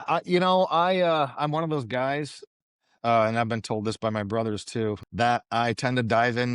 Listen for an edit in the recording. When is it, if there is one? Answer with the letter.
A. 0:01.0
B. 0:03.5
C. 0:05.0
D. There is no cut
C